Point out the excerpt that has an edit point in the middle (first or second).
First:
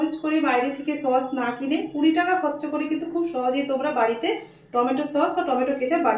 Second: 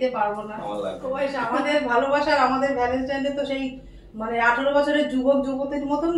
second